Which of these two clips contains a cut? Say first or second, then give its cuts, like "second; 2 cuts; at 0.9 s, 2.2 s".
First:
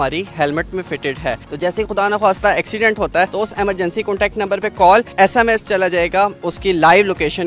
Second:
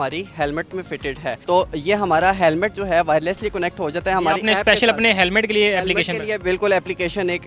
first; 4 cuts; at 1.4 s, 3.3 s, 5.1 s, 6.4 s